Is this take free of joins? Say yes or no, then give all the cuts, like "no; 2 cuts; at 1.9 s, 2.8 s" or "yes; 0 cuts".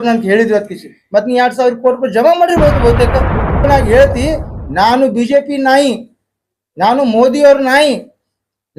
no; 1 cut; at 3.7 s